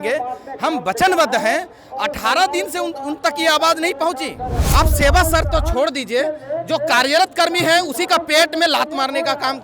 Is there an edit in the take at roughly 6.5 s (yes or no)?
no